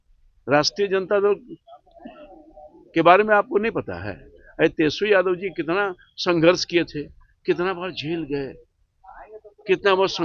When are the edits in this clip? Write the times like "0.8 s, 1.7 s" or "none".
none